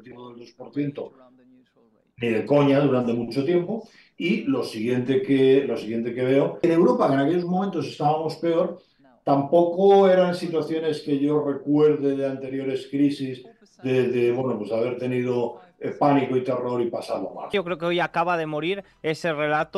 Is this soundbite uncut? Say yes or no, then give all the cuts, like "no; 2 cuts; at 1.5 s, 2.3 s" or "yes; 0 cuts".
no; 2 cuts; at 6.6 s, 17.5 s